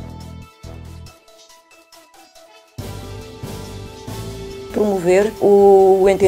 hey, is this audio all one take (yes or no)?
no